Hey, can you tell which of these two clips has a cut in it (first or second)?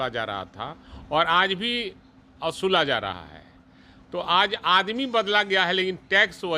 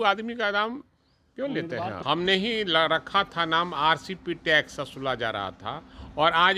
second